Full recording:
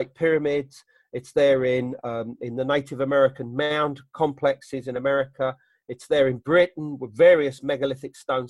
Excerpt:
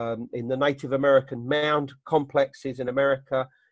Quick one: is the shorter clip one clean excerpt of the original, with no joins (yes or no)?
yes